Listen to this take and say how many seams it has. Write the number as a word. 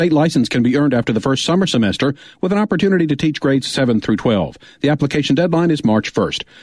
zero